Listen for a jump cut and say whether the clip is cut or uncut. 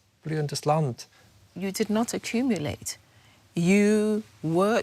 cut